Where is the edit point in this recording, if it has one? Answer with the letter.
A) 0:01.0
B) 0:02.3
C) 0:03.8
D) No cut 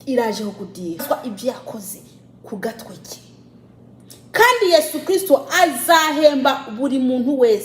A